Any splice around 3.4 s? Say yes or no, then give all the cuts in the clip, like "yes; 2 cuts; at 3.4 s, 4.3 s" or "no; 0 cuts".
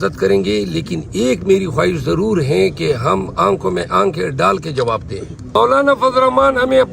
no; 1 cut; at 5.5 s